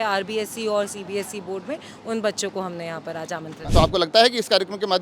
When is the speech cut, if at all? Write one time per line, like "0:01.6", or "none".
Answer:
0:03.6